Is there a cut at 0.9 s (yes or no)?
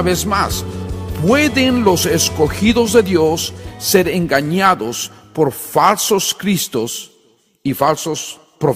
no